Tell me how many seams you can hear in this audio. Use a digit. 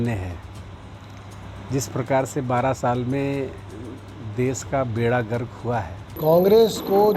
1